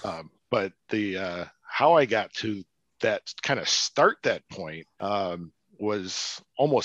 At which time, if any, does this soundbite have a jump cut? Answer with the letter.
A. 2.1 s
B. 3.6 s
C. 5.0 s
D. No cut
C